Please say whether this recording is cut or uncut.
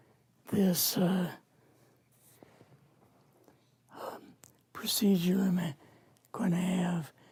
uncut